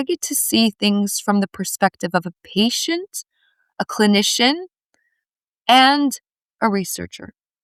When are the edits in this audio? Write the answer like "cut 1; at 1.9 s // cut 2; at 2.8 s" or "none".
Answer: none